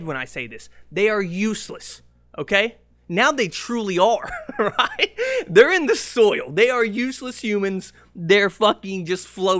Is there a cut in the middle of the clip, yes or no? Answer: no